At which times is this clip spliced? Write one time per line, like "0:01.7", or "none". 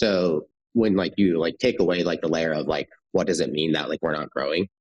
none